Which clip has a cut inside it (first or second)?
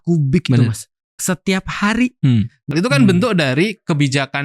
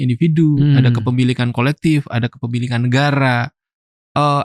first